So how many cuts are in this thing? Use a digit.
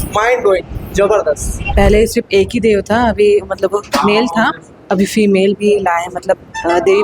1